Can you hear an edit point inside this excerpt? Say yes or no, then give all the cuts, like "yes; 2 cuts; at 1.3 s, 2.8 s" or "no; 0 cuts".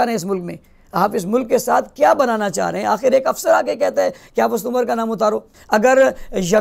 yes; 1 cut; at 5.5 s